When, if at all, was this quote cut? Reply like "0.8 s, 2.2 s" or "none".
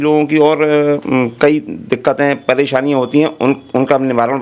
none